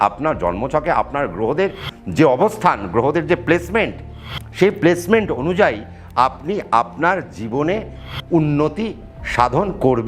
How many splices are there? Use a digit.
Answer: 0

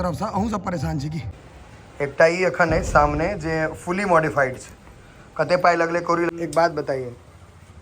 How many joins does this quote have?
2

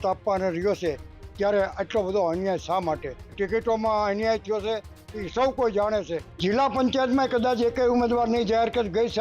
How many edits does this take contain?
2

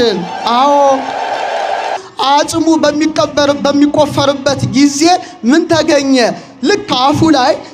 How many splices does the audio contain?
1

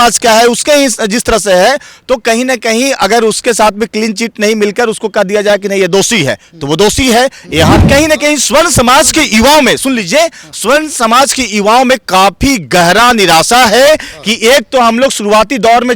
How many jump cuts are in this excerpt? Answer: 1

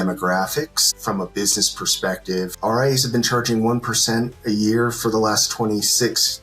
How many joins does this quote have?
2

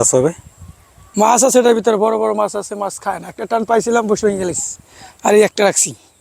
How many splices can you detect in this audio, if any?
1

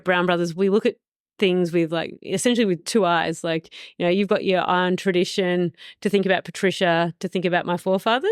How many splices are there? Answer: 0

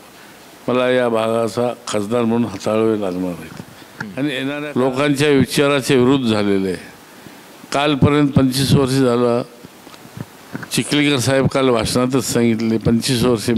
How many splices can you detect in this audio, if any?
1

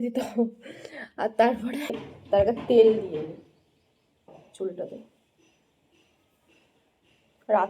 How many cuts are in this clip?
1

